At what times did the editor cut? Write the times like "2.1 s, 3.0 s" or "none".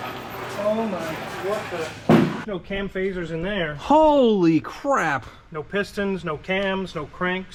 none